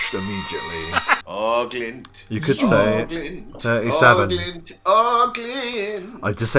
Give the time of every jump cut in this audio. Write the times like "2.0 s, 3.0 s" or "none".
1.2 s